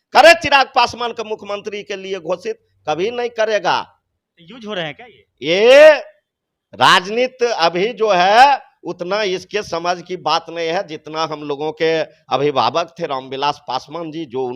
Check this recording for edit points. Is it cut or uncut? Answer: uncut